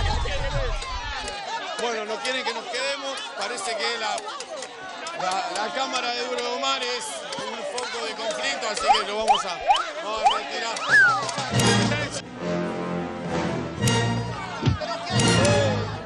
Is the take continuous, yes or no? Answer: yes